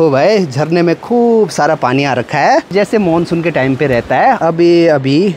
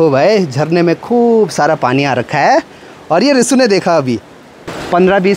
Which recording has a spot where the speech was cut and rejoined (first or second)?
first